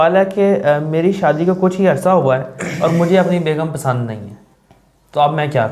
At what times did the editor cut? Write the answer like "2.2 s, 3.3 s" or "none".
none